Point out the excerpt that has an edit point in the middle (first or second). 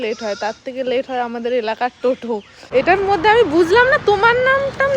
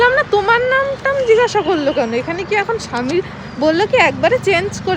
first